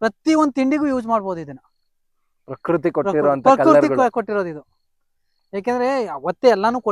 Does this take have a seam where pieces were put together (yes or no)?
no